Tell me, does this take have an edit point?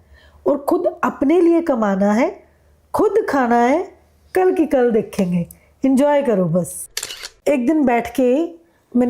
yes; 1 cut; at 6.9 s

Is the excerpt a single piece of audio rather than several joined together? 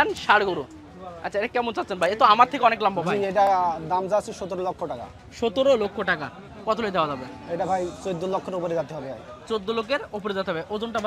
yes; 0 cuts

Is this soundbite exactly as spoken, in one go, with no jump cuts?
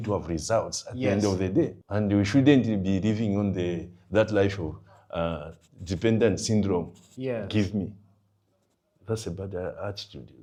yes; 0 cuts

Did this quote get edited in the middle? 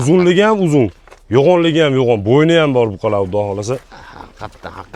no; 0 cuts

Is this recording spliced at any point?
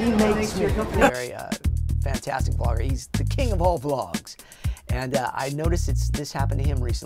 no; 0 cuts

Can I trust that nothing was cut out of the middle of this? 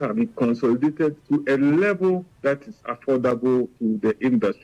no; 3 cuts; at 1.2 s, 2.4 s, 3.7 s

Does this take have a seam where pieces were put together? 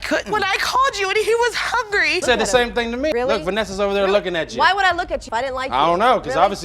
yes; 1 cut; at 2.2 s

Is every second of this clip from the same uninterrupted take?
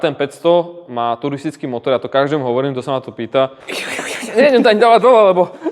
no; 1 cut; at 3.7 s

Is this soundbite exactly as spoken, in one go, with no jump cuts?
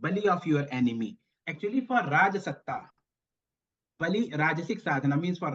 no; 1 cut; at 1.4 s

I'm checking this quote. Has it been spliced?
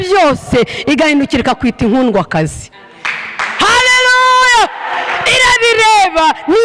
no; 0 cuts

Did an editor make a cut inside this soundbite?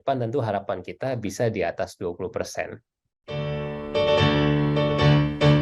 yes; 1 cut; at 2.9 s

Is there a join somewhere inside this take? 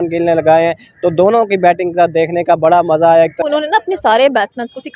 yes; 1 cut; at 3.4 s

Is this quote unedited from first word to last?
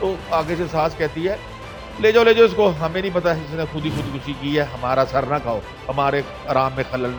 yes; 0 cuts

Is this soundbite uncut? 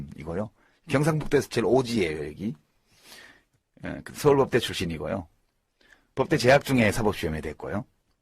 no; 1 cut; at 2.6 s

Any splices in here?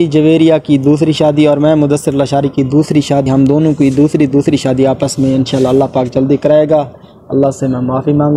no; 0 cuts

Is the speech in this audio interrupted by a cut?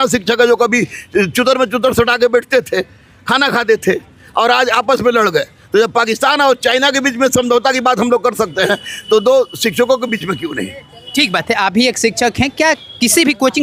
no; 0 cuts

